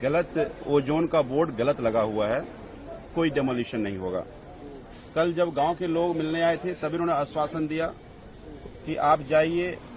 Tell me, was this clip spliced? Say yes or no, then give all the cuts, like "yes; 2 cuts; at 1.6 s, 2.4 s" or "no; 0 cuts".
no; 0 cuts